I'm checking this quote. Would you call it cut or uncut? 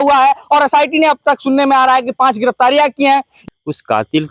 cut